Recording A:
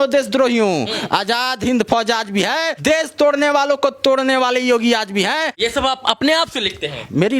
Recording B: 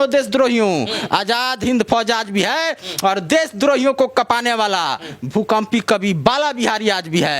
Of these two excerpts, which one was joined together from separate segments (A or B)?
A